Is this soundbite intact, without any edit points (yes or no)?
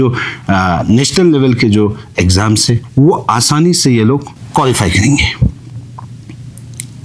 yes